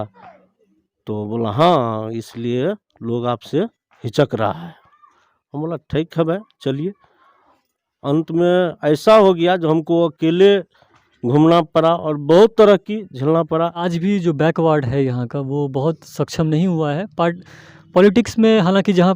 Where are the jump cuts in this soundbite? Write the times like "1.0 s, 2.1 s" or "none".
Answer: 13.9 s